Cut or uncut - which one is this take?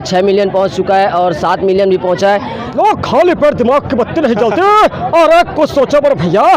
cut